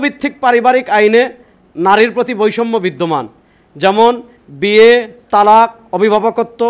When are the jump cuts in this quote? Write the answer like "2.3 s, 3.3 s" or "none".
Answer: none